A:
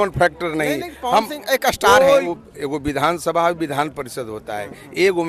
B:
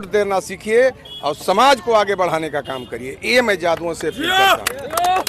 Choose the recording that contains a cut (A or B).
A